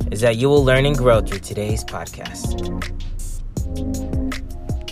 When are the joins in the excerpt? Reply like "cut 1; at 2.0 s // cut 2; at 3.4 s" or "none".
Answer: cut 1; at 2.1 s

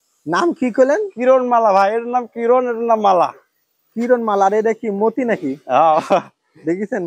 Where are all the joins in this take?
none

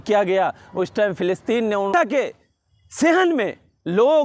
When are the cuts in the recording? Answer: cut 1; at 1.9 s

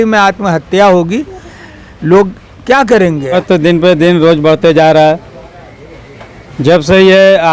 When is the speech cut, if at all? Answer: cut 1; at 3.3 s

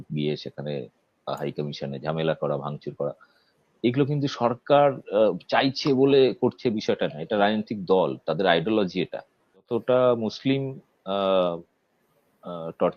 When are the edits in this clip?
cut 1; at 9.7 s

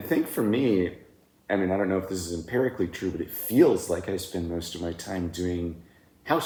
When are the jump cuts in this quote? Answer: none

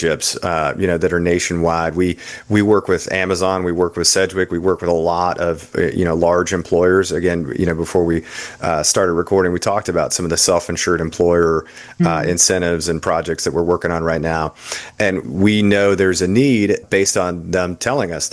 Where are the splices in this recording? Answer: cut 1; at 15.2 s // cut 2; at 16.8 s

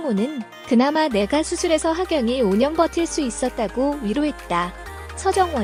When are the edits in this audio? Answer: none

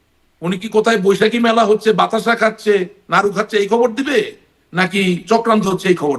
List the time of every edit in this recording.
none

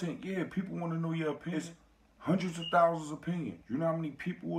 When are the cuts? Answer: cut 1; at 1.5 s

